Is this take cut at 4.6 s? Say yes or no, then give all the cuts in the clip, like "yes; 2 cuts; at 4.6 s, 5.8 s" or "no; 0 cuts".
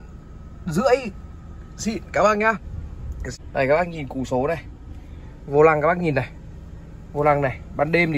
no; 1 cut; at 3.2 s